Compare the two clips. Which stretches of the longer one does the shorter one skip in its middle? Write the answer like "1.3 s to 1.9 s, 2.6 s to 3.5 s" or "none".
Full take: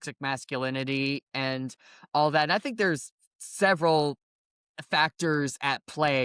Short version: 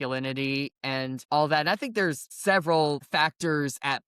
1.7 s to 2.0 s, 3.1 s to 3.4 s, 4.2 s to 4.8 s